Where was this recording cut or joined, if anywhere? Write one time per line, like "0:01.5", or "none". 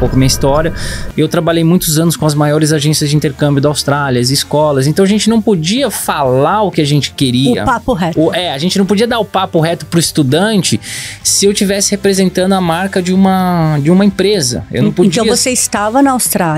none

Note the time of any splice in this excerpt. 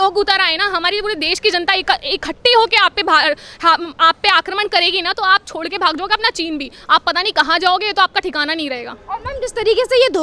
none

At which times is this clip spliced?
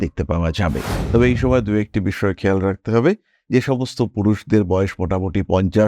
0:00.9

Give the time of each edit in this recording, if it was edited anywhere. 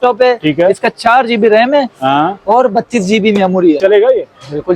0:03.8

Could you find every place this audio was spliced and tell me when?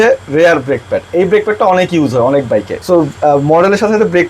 0:02.7

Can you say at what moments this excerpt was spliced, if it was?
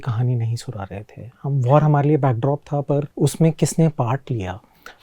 0:03.1

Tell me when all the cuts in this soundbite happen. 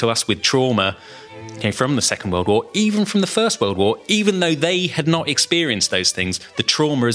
0:01.6

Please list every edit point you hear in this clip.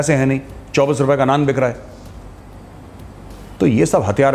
none

